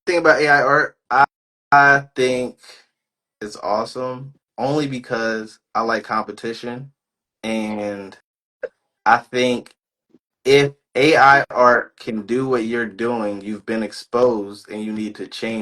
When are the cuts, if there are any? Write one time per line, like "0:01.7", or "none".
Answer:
0:01.0